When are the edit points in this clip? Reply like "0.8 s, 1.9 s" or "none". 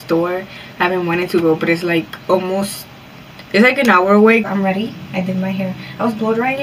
4.5 s